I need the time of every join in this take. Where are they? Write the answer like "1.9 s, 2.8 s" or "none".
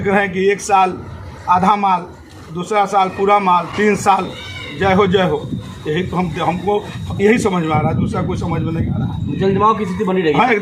none